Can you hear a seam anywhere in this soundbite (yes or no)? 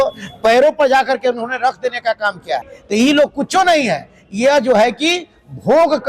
yes